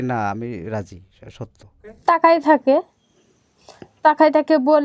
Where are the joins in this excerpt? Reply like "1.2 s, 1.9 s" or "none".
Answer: 1.9 s